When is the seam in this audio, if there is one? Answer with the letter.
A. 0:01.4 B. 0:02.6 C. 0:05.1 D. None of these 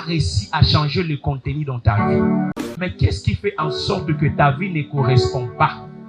B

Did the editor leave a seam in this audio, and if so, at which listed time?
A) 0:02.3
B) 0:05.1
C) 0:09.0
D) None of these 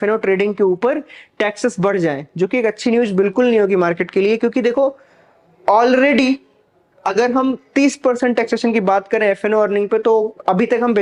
D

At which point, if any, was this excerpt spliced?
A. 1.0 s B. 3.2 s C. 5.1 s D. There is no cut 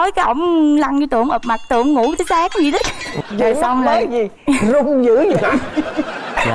B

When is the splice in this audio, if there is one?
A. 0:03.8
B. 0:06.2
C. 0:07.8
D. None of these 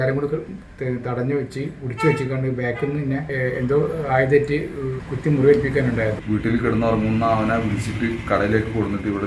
B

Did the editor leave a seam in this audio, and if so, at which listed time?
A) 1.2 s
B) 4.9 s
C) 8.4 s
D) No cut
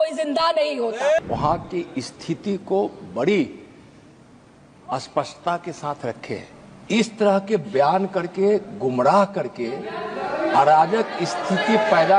A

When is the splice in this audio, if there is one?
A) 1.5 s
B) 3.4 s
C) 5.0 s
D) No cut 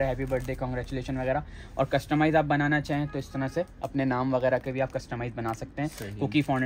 D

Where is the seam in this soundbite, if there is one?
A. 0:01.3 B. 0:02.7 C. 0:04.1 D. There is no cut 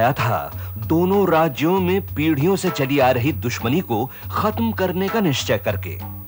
D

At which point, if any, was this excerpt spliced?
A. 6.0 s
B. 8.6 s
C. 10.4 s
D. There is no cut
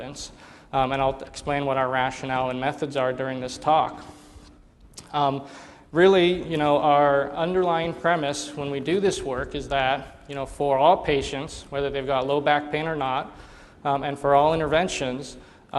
A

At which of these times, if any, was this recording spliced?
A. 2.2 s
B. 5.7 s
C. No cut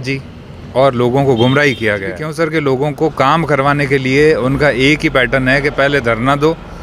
A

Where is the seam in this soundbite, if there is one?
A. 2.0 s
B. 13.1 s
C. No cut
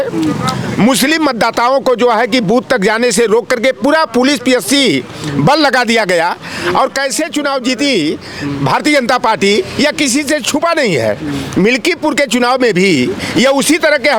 C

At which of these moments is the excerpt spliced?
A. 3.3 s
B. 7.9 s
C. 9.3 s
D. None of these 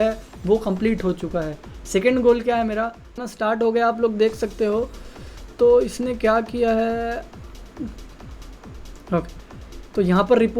A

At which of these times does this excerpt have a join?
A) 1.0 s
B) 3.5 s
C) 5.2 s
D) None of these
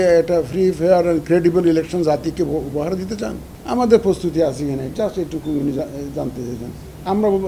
B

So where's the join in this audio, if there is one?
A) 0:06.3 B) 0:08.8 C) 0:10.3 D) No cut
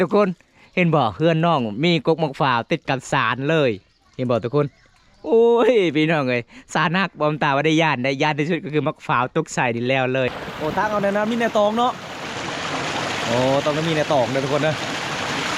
C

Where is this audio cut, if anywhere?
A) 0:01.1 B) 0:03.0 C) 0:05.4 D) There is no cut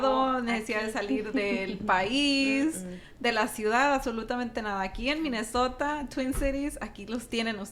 D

